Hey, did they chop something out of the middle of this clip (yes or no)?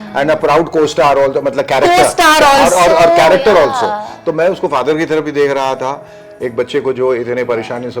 no